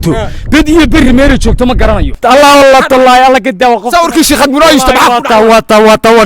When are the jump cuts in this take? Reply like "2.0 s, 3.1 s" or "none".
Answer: 2.1 s

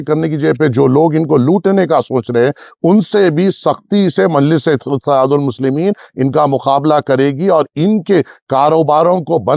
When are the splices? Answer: none

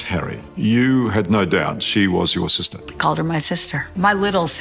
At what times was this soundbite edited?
none

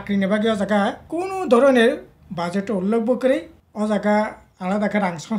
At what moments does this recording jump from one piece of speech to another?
1.0 s, 3.6 s

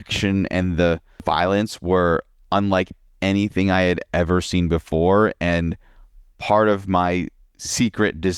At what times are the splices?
1.2 s

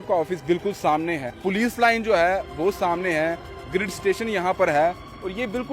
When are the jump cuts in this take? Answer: 1.4 s

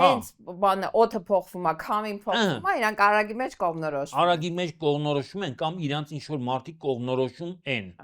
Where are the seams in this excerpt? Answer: none

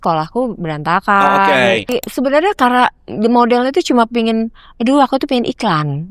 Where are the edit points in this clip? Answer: 2.0 s

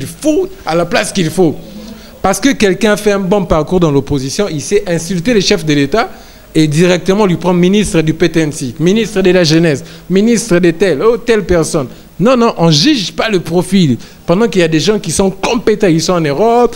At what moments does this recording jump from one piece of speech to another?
none

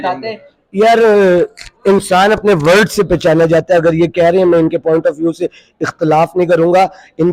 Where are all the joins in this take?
none

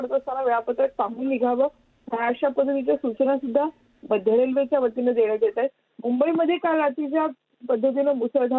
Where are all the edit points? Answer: 2.4 s

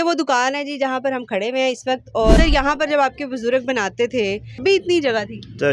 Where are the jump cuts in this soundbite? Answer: 2.4 s, 4.6 s

